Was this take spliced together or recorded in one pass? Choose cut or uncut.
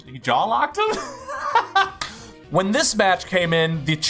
cut